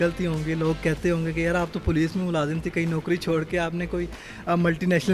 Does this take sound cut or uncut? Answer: uncut